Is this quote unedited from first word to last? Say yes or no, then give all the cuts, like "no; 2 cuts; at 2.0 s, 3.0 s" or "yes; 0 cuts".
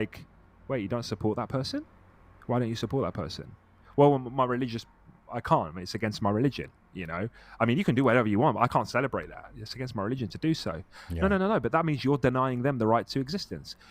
yes; 0 cuts